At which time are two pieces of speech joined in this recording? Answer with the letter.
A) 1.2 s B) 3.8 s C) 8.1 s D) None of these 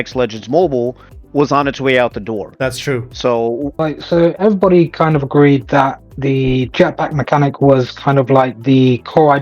B